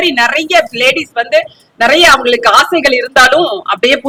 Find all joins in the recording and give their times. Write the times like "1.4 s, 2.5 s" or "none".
none